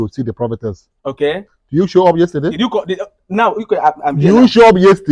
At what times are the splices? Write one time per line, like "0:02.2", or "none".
none